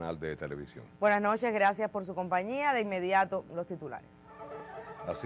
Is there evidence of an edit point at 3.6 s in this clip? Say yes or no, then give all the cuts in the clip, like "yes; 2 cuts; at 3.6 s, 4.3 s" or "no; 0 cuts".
yes; 1 cut; at 3.6 s